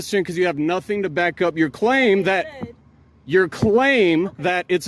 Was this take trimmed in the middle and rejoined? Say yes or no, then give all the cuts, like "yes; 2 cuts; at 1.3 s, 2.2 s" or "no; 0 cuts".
no; 0 cuts